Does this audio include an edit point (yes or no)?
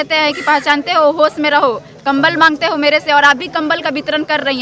no